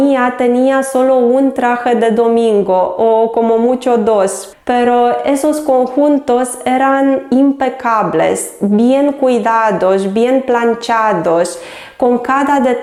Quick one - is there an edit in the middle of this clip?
no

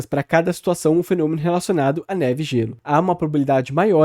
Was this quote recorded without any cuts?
no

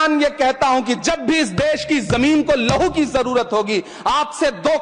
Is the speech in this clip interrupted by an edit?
no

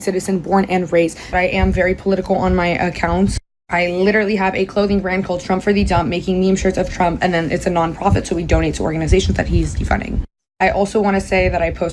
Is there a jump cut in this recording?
yes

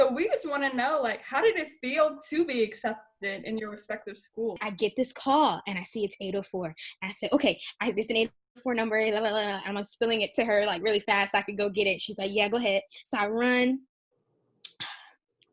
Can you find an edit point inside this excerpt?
yes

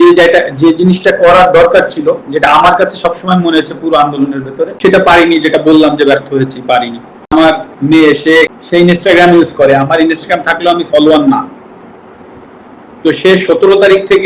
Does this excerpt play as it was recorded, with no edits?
no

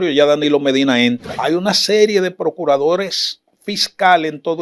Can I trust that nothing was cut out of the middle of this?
no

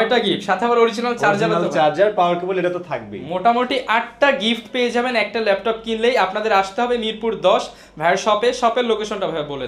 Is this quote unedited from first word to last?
yes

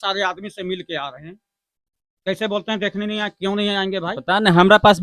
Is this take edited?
no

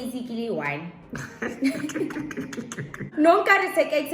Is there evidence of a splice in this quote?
no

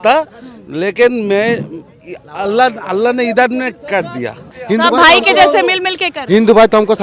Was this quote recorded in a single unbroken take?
no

